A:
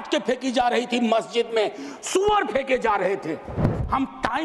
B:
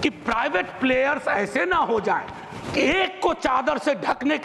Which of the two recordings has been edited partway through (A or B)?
A